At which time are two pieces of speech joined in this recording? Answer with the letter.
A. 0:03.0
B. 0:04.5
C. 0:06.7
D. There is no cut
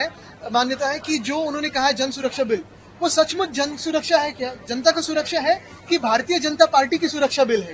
D